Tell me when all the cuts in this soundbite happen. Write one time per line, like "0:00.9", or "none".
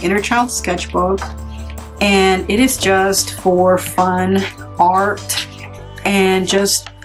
none